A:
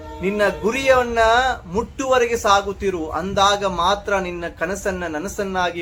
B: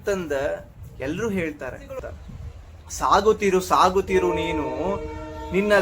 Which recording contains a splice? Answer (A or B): B